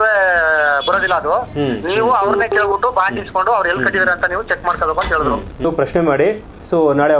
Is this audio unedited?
no; 1 cut; at 5.6 s

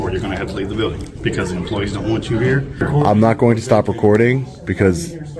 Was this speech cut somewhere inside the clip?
yes; 1 cut; at 2.8 s

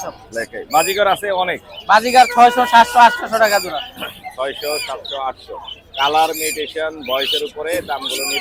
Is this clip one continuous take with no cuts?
yes; 0 cuts

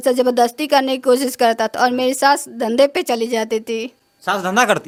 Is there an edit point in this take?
no; 0 cuts

